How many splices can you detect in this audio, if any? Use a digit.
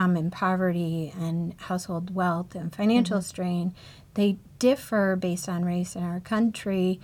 0